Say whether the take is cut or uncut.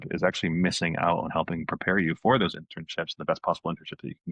uncut